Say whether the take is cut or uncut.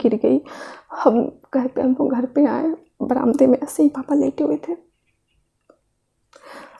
uncut